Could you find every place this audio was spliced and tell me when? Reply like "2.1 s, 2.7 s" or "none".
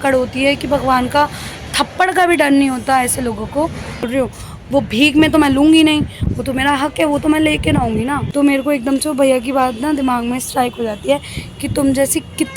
4.1 s, 8.2 s